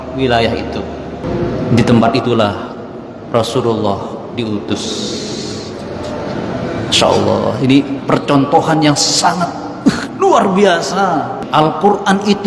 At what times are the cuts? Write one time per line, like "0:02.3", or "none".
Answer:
0:01.2
0:11.4